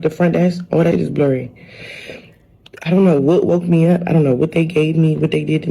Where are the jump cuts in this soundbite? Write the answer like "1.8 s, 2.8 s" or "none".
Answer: 0.9 s